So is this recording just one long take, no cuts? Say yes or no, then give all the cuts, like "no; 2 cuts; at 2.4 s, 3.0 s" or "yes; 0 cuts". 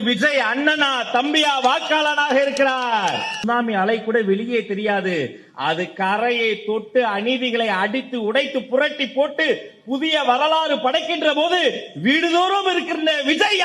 no; 1 cut; at 3.4 s